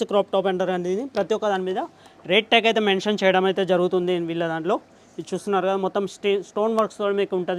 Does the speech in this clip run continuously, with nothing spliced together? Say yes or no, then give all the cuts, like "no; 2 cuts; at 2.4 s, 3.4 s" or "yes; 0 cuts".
yes; 0 cuts